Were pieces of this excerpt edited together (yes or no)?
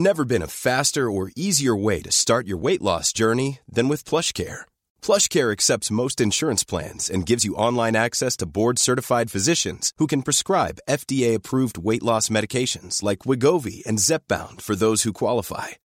no